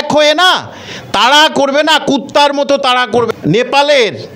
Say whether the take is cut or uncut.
cut